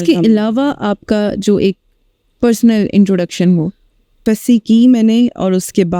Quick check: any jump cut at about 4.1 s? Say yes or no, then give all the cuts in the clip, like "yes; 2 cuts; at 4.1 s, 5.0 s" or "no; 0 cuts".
yes; 1 cut; at 4.1 s